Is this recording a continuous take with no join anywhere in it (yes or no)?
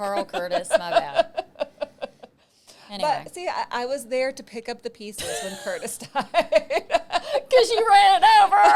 yes